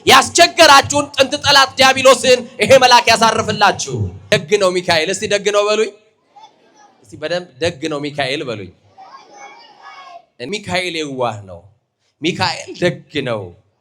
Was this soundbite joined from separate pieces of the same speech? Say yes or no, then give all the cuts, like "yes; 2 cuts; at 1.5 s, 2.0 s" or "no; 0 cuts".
yes; 2 cuts; at 4.2 s, 10.3 s